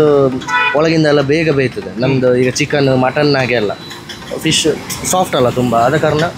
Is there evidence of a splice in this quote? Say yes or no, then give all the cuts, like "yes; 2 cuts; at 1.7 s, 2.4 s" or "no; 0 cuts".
no; 0 cuts